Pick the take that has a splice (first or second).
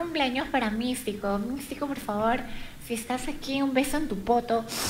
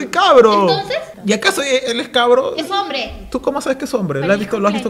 second